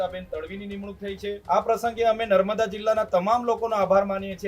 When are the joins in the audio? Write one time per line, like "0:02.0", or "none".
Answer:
0:01.4